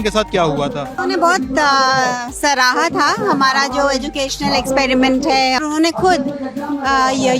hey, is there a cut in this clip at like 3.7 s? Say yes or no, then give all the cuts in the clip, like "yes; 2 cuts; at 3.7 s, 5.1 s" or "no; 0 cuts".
no; 2 cuts; at 0.9 s, 5.6 s